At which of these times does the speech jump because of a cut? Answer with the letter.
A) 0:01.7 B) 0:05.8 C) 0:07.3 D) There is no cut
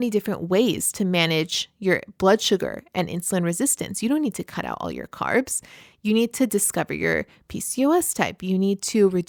D